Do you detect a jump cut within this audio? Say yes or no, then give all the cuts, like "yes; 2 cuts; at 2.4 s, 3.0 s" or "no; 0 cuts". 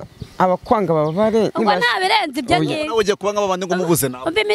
no; 0 cuts